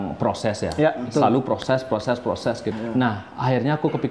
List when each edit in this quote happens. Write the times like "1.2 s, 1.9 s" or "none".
2.7 s